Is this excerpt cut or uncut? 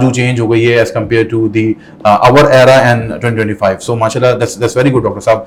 uncut